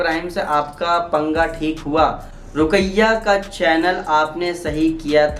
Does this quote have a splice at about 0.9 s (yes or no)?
no